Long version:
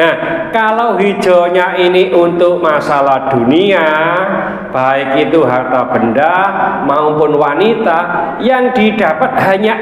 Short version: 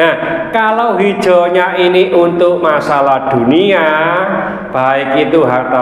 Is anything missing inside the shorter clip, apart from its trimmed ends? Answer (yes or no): no